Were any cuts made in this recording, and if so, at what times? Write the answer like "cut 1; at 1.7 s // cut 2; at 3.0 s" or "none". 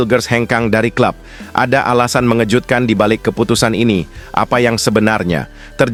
none